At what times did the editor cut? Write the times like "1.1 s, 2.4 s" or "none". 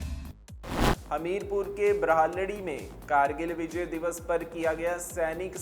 1.0 s